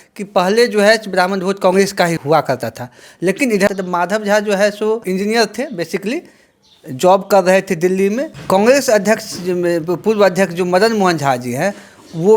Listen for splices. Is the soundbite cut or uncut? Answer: cut